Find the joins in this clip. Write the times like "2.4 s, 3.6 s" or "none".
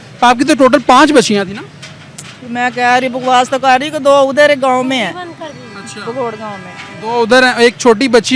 none